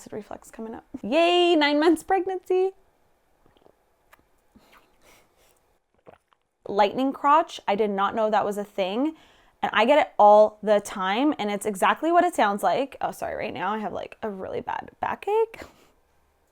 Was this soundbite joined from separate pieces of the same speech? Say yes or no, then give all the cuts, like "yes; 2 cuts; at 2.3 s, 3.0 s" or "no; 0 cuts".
yes; 2 cuts; at 1.0 s, 6.6 s